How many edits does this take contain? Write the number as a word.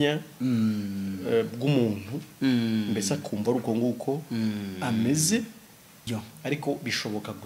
one